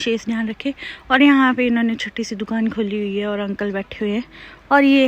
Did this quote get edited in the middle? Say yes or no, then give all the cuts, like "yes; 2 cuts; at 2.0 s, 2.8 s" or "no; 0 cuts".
no; 0 cuts